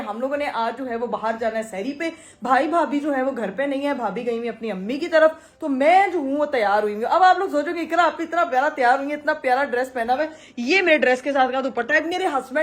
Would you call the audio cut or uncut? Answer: uncut